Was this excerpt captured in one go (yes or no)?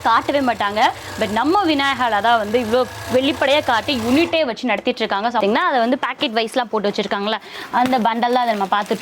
no